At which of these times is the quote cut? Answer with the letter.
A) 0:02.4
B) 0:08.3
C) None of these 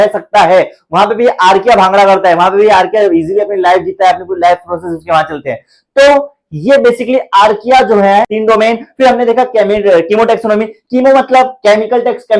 B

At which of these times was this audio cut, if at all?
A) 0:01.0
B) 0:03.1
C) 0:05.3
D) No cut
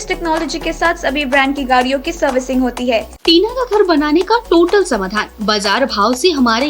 B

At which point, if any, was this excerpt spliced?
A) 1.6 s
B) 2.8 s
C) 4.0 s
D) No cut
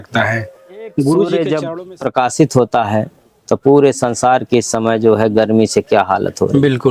A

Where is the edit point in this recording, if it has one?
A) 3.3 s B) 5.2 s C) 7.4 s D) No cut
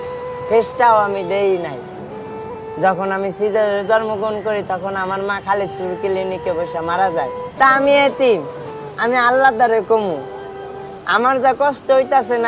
C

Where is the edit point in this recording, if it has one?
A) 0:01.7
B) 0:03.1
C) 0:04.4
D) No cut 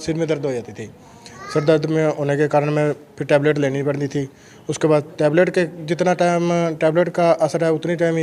D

